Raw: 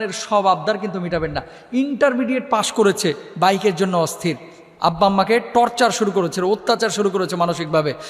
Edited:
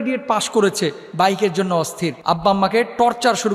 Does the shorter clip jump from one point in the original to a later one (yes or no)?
yes